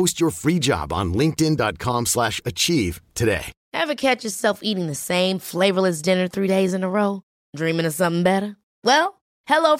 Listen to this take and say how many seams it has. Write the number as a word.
one